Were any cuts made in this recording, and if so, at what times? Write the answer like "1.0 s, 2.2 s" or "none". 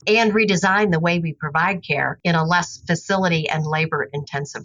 none